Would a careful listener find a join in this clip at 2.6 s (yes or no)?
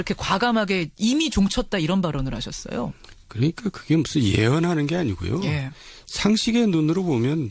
yes